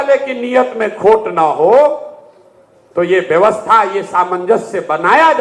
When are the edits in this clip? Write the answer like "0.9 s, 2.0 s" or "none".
none